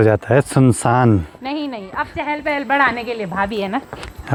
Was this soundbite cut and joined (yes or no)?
no